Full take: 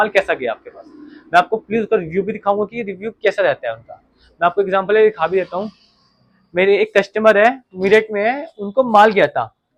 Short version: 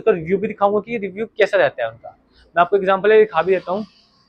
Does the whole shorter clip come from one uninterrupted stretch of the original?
yes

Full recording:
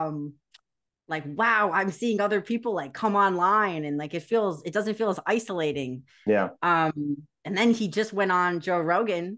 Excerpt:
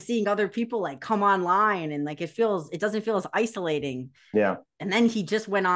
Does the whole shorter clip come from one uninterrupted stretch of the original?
no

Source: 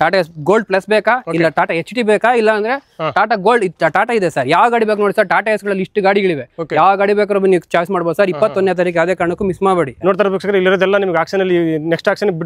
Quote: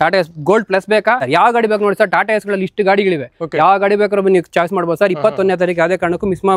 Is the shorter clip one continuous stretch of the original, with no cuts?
no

